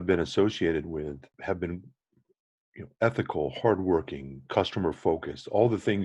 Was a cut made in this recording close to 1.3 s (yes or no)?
yes